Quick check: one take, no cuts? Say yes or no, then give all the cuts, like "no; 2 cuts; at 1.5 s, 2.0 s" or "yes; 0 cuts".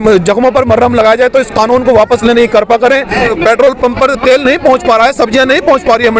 no; 1 cut; at 3.2 s